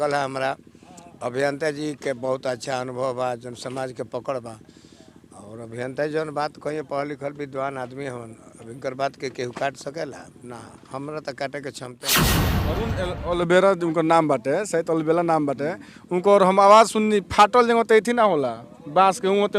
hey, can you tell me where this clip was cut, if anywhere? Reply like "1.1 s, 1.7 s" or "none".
12.0 s, 12.8 s